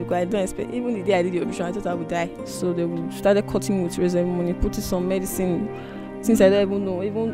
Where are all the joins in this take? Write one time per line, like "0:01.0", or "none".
0:02.4